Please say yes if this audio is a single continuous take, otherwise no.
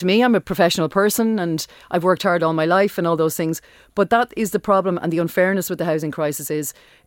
yes